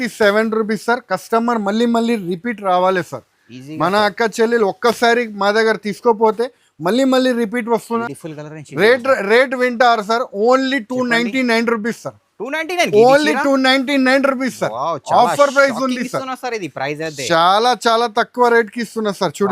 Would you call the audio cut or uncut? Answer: cut